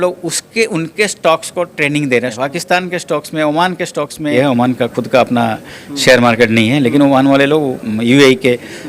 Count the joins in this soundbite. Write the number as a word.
two